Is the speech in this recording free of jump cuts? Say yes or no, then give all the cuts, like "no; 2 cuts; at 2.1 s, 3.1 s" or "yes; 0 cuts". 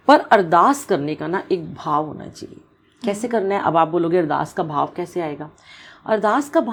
yes; 0 cuts